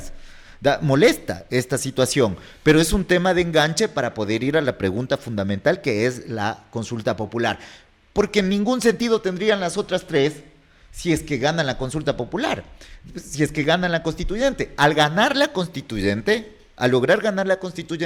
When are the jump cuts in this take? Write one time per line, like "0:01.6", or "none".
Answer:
none